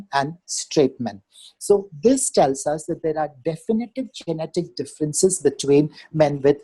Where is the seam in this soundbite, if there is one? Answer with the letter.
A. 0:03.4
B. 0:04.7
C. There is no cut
C